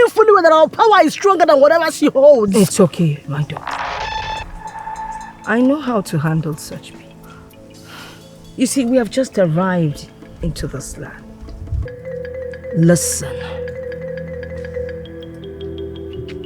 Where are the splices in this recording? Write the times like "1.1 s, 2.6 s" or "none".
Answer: 11.9 s